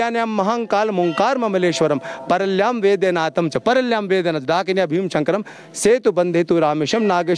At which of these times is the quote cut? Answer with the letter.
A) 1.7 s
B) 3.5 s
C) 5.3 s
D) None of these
D